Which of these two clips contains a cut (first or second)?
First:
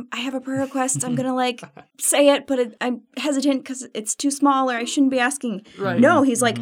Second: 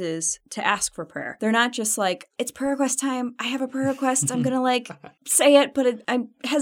second